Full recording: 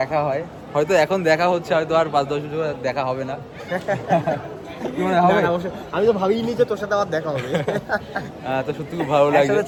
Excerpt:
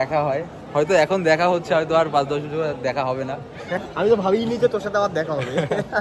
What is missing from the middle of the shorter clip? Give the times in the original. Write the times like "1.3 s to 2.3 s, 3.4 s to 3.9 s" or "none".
3.8 s to 5.7 s